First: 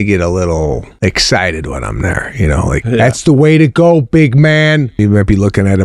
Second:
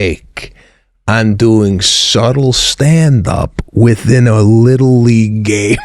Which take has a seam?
first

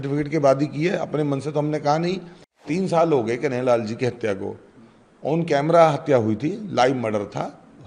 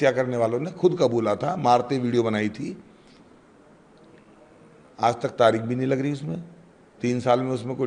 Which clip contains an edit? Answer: first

